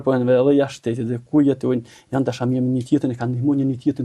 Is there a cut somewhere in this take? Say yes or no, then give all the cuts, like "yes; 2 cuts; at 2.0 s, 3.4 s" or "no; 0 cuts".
no; 0 cuts